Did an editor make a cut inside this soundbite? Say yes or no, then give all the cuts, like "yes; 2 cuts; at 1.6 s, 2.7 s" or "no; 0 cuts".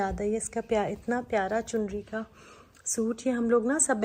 no; 0 cuts